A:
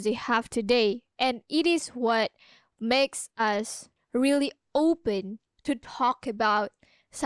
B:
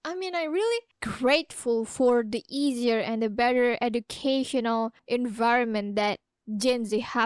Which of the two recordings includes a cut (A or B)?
B